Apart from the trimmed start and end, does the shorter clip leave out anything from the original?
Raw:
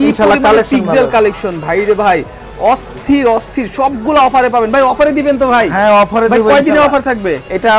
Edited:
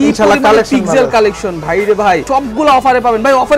yes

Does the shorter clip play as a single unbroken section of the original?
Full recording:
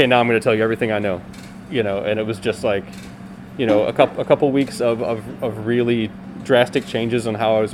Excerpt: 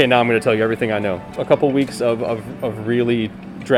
no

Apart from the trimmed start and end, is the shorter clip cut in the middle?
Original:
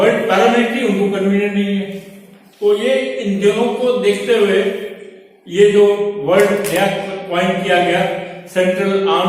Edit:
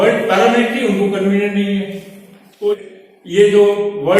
yes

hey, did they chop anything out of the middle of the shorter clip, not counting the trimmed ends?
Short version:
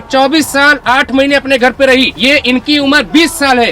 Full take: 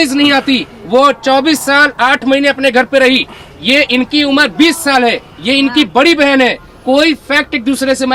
yes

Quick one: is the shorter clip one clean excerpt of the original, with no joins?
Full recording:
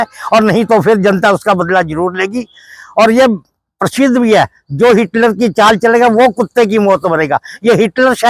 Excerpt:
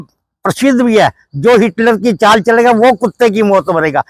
yes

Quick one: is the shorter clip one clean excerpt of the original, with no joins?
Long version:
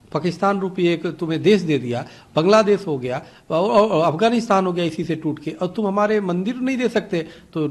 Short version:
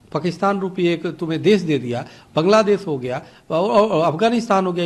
yes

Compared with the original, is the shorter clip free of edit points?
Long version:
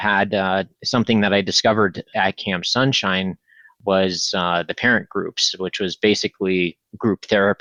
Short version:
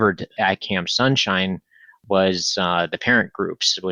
yes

